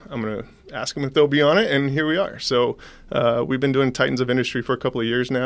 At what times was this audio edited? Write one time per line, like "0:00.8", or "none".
none